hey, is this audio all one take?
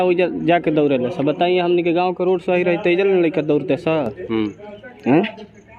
yes; 0 cuts

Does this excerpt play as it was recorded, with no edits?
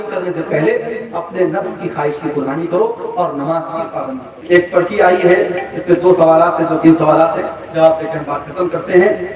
no; 1 cut; at 4.3 s

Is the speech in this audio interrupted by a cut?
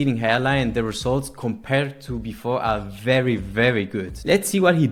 no; 0 cuts

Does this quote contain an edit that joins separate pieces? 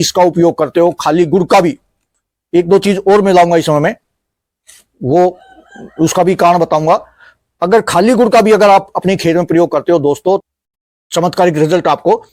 no; 0 cuts

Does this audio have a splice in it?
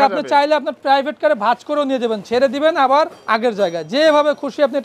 yes; 1 cut; at 3.2 s

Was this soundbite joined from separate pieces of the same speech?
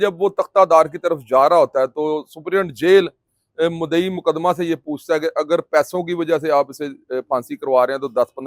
no; 0 cuts

